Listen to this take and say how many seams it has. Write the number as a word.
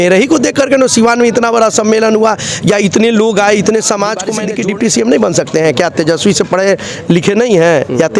one